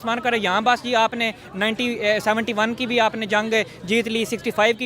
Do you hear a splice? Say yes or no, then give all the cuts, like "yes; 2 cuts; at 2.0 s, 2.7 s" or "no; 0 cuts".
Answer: no; 0 cuts